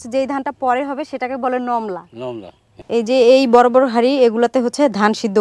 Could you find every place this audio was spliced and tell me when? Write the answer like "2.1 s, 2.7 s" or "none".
2.7 s